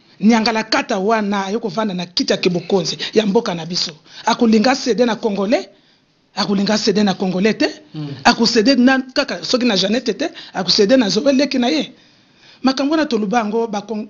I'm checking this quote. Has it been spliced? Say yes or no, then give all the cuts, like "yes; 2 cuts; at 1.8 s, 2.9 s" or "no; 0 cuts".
no; 0 cuts